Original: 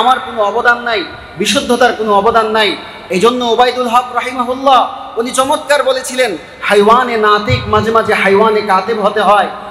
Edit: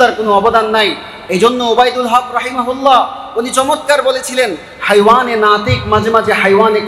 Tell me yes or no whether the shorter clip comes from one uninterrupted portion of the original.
yes